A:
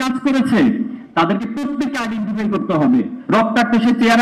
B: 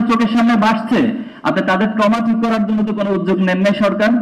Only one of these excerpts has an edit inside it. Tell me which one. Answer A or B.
A